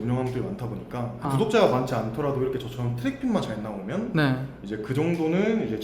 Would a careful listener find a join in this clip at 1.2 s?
yes; 1 cut; at 1.2 s

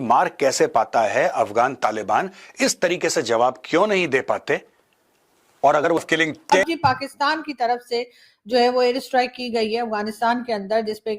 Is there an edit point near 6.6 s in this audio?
yes; 1 cut; at 6.6 s

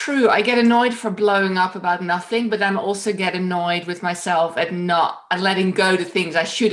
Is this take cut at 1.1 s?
no; 0 cuts

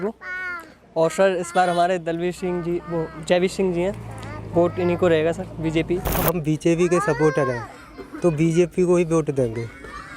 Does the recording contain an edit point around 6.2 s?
yes; 1 cut; at 6.2 s

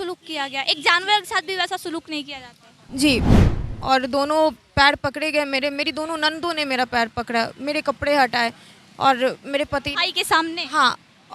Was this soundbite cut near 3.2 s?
yes; 1 cut; at 3.2 s

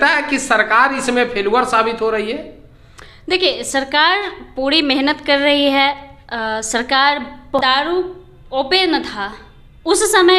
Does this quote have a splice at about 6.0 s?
no; 1 cut; at 7.6 s

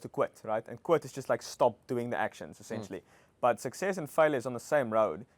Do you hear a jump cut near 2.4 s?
no; 0 cuts

